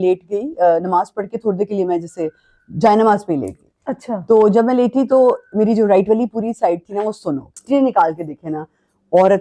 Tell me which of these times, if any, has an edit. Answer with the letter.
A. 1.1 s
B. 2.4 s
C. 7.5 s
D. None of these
C